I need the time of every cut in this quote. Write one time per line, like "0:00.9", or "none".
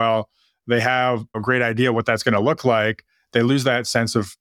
0:01.4